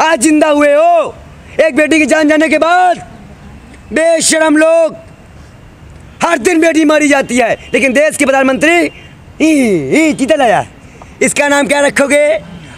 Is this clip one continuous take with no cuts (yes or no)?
yes